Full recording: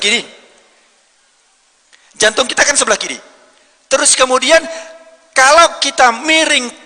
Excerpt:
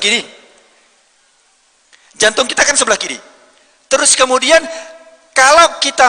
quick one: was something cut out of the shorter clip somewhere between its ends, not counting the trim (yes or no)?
no